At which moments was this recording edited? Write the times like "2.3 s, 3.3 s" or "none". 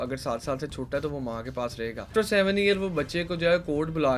2.1 s

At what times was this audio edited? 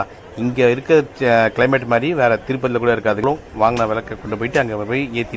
3.2 s

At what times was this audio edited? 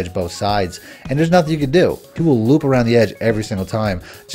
2.1 s

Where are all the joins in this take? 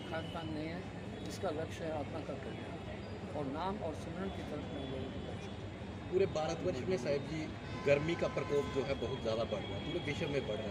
none

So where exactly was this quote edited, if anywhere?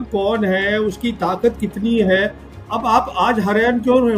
none

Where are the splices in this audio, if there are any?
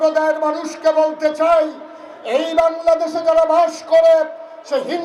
none

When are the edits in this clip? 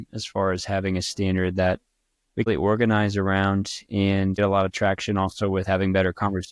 2.5 s, 4.4 s

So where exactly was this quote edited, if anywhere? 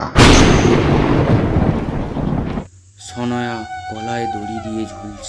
2.6 s

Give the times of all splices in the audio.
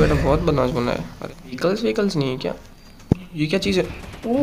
1.6 s

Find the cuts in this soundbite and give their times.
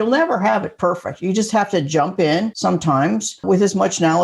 2.5 s, 3.4 s

